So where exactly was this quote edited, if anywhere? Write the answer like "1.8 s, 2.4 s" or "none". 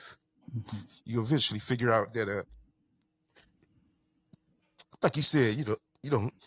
none